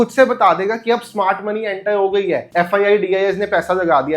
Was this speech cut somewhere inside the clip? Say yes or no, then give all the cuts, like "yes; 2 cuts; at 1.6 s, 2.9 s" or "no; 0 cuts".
yes; 1 cut; at 2.5 s